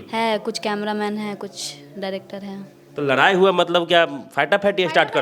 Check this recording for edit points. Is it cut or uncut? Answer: uncut